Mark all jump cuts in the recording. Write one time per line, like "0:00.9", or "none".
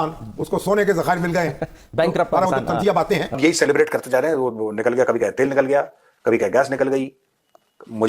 0:03.4